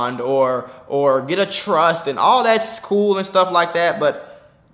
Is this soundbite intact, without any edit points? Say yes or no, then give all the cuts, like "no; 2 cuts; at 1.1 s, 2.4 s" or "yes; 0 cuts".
yes; 0 cuts